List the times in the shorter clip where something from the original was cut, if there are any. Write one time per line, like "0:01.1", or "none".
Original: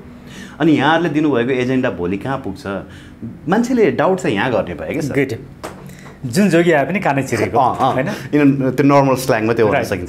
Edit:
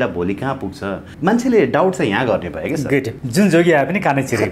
0:01.1
0:03.2